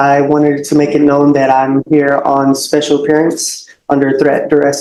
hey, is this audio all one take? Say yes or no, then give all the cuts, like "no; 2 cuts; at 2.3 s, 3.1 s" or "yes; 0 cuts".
yes; 0 cuts